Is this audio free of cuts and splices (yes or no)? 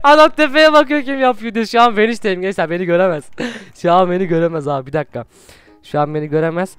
yes